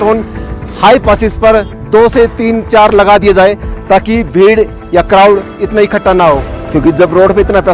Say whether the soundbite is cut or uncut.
cut